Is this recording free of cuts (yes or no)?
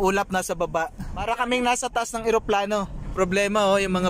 no